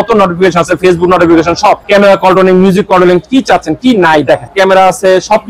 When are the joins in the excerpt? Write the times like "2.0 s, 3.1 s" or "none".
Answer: 1.8 s, 4.5 s